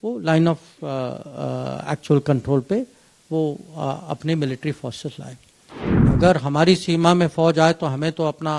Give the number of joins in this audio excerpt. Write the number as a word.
one